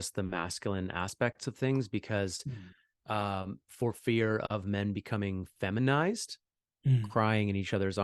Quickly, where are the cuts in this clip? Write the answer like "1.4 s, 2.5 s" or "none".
7.0 s